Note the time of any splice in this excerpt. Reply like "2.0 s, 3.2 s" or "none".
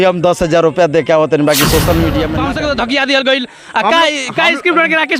2.3 s